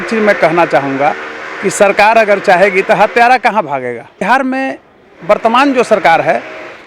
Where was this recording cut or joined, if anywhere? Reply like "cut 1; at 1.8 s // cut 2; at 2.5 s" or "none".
cut 1; at 4.2 s